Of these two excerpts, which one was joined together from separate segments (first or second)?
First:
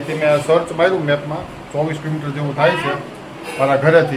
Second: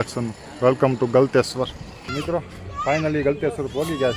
second